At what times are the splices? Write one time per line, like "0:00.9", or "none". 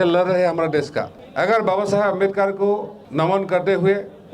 0:01.2
0:03.0